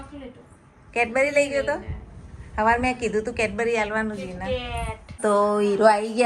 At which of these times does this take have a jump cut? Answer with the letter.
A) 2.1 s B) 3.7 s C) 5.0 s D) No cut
C